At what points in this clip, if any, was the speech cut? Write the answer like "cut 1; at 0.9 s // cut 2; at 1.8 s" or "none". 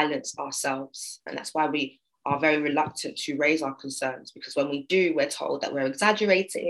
cut 1; at 1.3 s

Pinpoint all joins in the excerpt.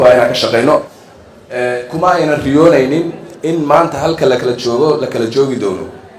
cut 1; at 0.9 s

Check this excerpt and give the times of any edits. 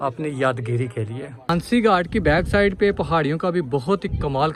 cut 1; at 1.4 s

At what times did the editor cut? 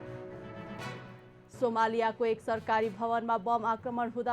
none

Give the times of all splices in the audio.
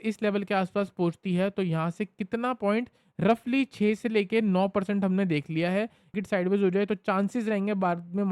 cut 1; at 6.1 s

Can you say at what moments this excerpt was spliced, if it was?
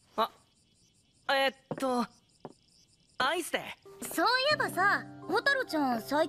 none

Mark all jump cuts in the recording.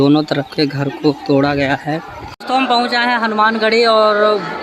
cut 1; at 2.3 s

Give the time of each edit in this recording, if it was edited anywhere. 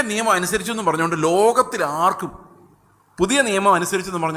none

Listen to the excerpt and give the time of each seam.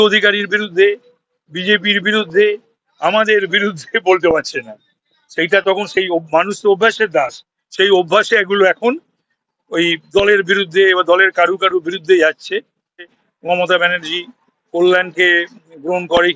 cut 1; at 13.1 s

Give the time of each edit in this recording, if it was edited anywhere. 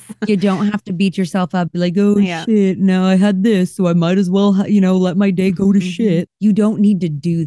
cut 1; at 6.3 s

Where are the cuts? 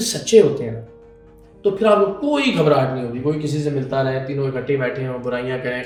none

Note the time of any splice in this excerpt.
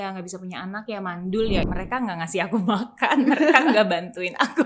cut 1; at 1.6 s

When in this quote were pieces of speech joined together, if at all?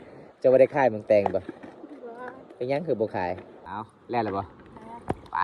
cut 1; at 3.6 s

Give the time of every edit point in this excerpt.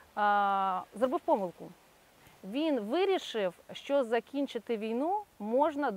none

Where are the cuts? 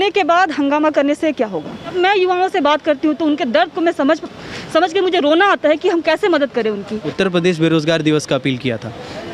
cut 1; at 1.9 s // cut 2; at 7.0 s

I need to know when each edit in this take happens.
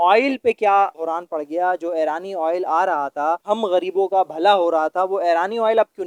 none

